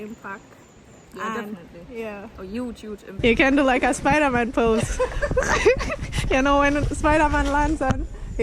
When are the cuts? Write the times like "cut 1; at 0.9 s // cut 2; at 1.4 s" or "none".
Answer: cut 1; at 3.2 s // cut 2; at 6.1 s